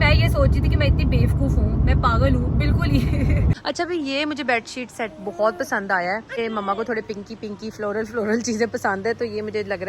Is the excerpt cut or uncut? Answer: cut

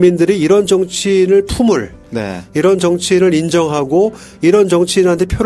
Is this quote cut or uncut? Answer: uncut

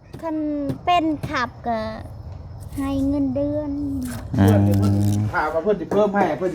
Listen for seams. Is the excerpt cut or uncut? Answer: cut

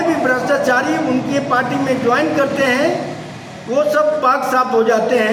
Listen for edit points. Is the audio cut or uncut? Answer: uncut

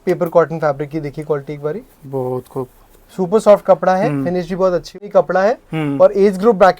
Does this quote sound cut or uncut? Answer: cut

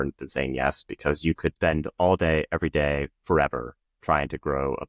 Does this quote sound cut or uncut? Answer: cut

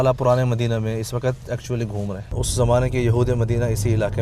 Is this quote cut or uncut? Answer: cut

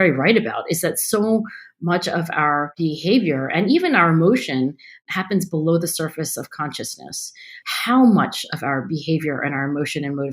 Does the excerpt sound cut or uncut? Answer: cut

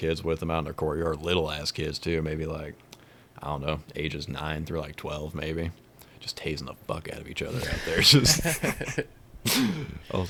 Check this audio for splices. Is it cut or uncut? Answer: uncut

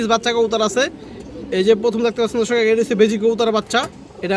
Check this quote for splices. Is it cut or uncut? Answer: uncut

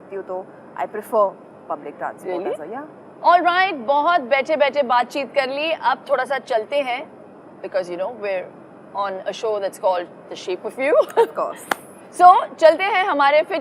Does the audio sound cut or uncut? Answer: uncut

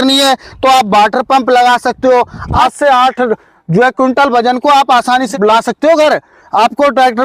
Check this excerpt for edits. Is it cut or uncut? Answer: cut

